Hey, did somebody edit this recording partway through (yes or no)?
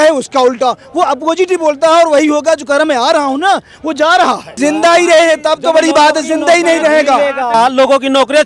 yes